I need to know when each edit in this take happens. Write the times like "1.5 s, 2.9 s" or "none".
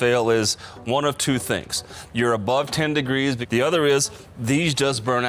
3.4 s